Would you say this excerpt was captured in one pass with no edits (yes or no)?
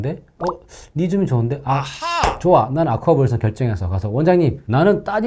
yes